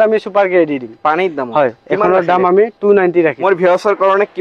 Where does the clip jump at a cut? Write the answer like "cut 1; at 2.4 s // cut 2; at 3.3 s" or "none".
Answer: cut 1; at 3.4 s